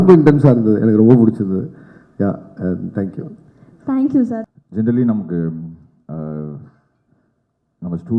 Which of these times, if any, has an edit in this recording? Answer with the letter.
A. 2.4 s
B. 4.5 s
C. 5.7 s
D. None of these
B